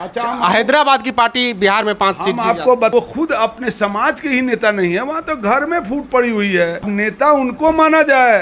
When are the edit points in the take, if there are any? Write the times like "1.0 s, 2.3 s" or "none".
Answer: 2.9 s, 6.9 s